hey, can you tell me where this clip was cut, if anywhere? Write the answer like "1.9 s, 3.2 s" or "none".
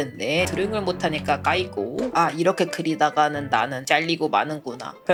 none